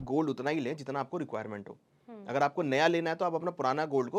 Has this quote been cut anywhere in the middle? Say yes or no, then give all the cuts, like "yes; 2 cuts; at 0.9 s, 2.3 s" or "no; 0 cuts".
no; 0 cuts